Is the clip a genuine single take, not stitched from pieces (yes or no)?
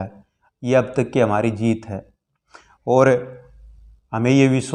yes